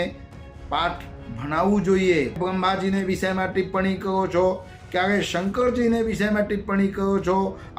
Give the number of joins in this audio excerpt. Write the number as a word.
one